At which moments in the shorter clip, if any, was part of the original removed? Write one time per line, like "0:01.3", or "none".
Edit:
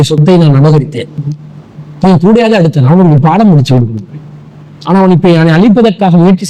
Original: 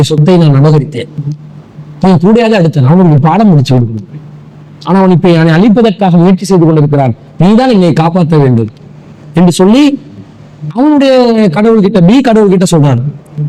none